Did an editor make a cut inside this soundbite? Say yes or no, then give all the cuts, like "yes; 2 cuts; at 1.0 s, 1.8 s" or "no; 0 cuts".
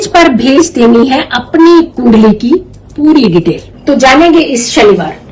no; 0 cuts